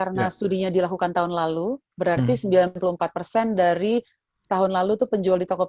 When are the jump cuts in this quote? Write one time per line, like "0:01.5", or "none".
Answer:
0:02.7